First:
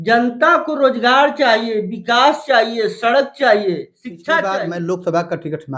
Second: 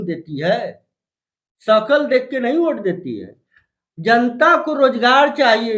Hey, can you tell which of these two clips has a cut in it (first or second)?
first